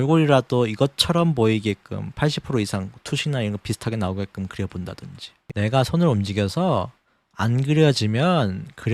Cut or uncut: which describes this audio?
cut